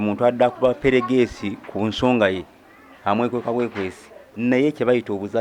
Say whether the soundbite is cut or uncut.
cut